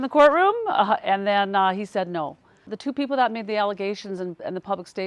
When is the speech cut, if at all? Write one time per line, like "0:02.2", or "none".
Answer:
0:02.7

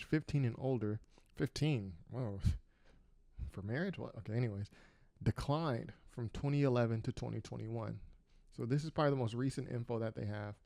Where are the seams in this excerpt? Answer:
none

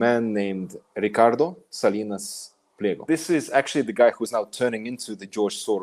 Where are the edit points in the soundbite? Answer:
0:03.0

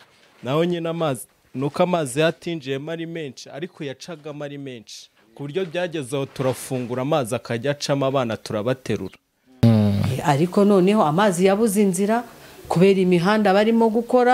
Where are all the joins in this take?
0:09.6

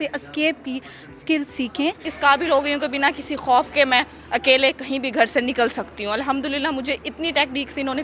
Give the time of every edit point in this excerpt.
0:02.1

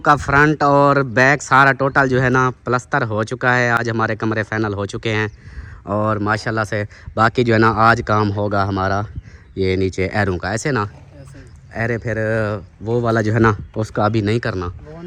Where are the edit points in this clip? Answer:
none

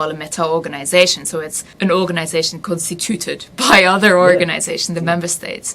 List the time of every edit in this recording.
0:01.6

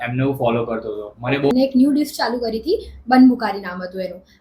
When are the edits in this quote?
0:01.5

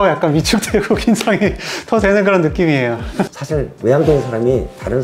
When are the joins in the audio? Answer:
0:03.3

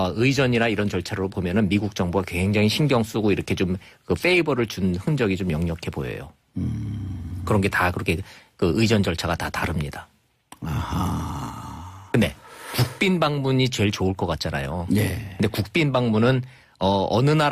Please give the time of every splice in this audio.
0:05.9

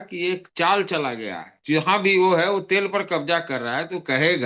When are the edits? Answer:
0:01.5

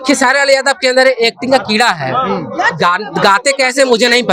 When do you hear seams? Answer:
none

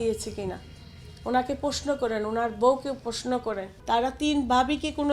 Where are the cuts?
0:03.7

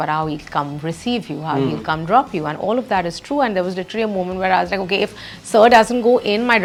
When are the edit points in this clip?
none

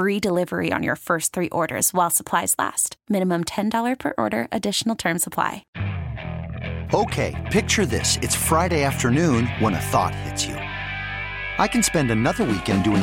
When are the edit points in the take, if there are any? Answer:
0:05.7

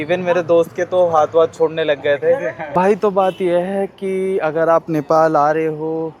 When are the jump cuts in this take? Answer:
0:02.6

